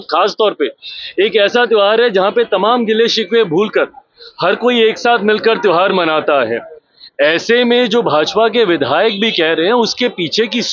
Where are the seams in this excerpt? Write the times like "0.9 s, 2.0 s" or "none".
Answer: none